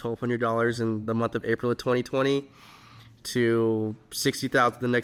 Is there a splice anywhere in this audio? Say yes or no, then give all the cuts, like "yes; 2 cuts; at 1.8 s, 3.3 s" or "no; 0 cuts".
no; 0 cuts